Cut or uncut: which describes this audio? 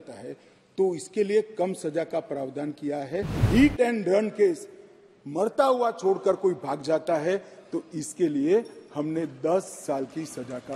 cut